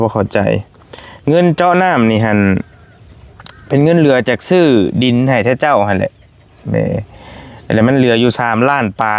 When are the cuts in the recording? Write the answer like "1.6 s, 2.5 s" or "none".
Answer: none